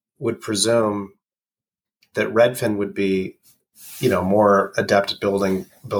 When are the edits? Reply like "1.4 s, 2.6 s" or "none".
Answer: none